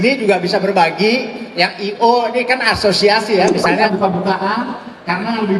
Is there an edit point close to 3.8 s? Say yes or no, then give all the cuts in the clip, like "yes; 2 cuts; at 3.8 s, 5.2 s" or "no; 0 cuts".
yes; 1 cut; at 3.8 s